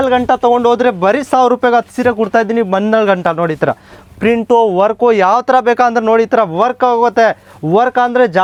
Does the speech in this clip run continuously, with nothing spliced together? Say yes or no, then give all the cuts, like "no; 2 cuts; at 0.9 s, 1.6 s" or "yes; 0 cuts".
yes; 0 cuts